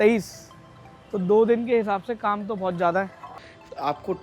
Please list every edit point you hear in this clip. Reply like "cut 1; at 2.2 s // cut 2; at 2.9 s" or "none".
cut 1; at 3.3 s